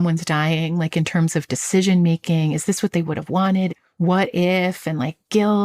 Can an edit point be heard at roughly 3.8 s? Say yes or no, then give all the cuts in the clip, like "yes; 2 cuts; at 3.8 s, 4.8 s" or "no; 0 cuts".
yes; 1 cut; at 3.8 s